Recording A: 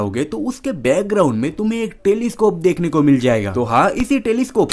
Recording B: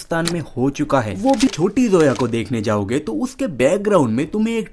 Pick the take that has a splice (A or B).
B